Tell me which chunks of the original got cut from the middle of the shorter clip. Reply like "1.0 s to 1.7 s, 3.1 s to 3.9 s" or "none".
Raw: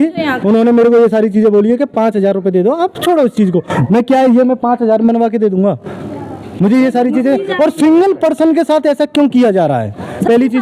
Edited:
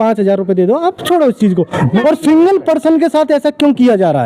4.0 s to 7.6 s